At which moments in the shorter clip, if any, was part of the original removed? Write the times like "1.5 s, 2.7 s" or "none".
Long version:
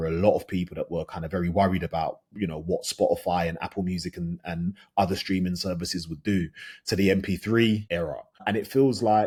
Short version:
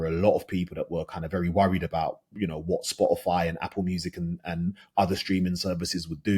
none